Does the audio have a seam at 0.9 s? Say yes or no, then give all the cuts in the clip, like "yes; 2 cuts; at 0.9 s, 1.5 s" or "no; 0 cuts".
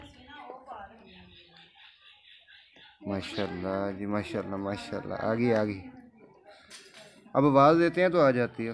yes; 1 cut; at 0.9 s